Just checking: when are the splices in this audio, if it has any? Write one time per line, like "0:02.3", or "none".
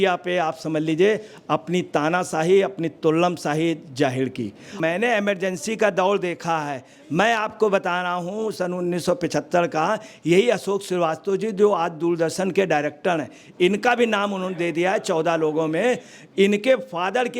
0:04.7